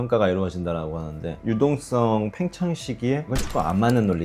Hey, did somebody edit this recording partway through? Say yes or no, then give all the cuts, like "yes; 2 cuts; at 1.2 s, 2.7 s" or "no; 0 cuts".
yes; 2 cuts; at 1.4 s, 3.3 s